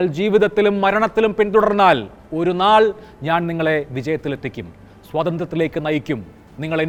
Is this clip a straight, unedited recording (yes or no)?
yes